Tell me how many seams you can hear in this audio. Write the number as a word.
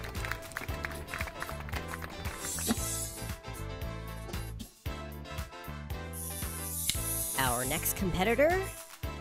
one